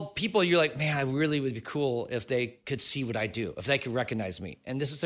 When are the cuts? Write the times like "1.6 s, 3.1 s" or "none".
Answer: none